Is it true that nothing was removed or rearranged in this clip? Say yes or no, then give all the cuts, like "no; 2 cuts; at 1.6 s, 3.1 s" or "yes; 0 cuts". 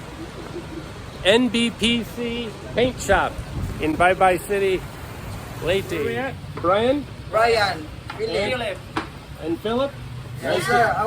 no; 1 cut; at 6.3 s